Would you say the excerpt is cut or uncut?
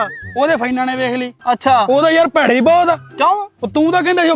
uncut